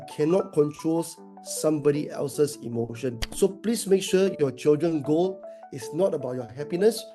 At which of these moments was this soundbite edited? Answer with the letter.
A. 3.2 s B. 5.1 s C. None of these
A